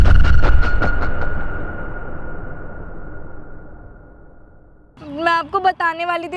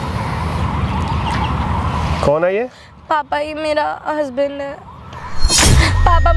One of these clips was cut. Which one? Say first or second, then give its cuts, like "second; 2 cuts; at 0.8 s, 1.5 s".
first; 1 cut; at 5.0 s